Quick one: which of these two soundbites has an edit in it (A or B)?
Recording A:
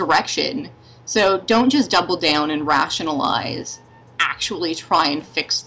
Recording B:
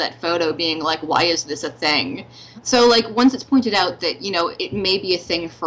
B